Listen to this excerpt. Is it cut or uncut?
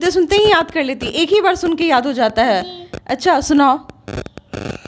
uncut